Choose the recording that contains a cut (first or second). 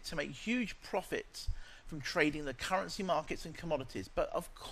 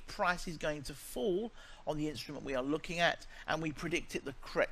first